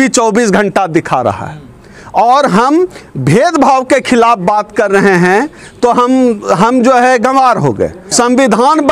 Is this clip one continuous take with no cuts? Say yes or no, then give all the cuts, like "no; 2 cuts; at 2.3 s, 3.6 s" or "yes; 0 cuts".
no; 1 cut; at 8.0 s